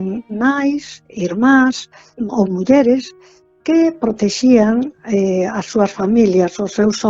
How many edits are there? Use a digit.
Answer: 1